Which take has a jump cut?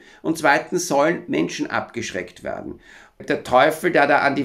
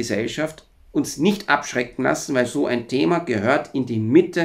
first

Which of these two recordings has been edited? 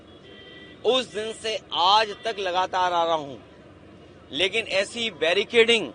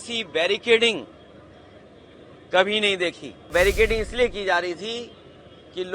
second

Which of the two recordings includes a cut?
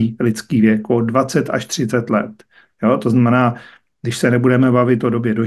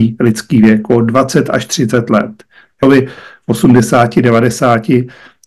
second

